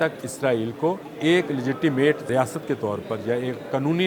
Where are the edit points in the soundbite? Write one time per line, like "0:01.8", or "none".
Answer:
0:01.1
0:02.2